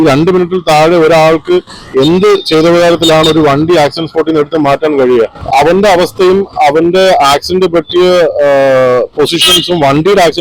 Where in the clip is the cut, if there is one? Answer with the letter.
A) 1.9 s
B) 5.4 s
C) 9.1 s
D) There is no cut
B